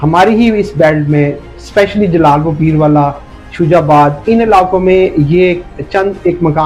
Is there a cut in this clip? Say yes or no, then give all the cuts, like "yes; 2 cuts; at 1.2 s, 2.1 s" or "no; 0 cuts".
no; 0 cuts